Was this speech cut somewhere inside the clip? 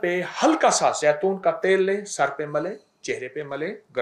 no; 0 cuts

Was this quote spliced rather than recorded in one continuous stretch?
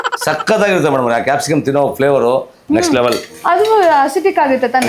yes; 1 cut; at 3.3 s

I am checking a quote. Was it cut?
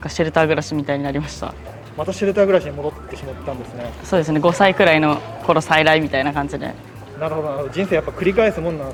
no; 0 cuts

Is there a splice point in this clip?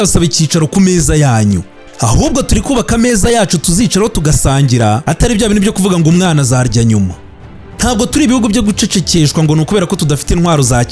no; 0 cuts

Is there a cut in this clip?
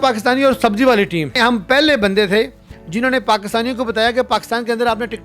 yes; 1 cut; at 1.3 s

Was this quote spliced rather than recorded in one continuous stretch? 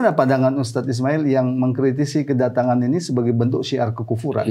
no; 0 cuts

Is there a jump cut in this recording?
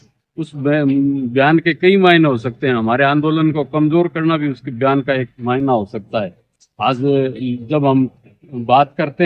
no; 0 cuts

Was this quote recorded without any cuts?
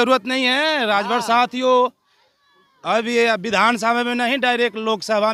yes; 0 cuts

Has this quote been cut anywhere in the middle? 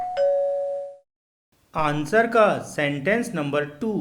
yes; 1 cut; at 0.9 s

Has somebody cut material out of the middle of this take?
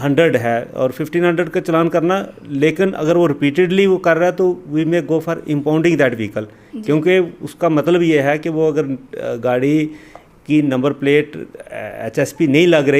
no; 0 cuts

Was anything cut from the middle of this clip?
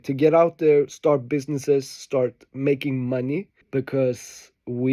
yes; 1 cut; at 3.6 s

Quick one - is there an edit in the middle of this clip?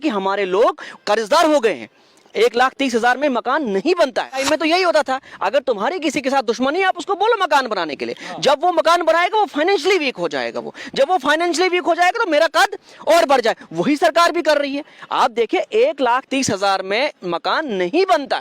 yes; 1 cut; at 4.4 s

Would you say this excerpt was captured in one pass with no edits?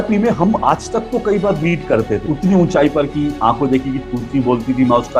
no; 1 cut; at 2.2 s

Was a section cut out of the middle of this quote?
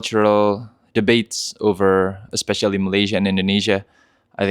yes; 1 cut; at 2.3 s

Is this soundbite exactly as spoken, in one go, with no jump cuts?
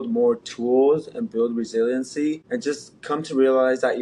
no; 1 cut; at 2.5 s

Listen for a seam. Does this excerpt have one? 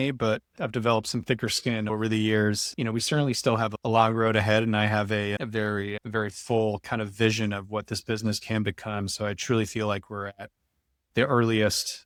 no; 0 cuts

